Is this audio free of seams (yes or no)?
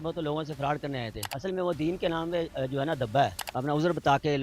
no